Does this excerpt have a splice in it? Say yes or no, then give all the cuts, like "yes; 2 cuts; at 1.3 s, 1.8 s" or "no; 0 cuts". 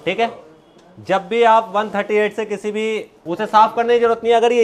no; 0 cuts